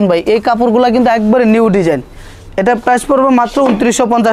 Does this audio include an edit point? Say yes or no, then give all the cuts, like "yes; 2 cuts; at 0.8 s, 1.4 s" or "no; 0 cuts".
no; 0 cuts